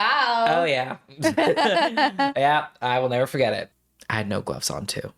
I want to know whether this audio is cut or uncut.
cut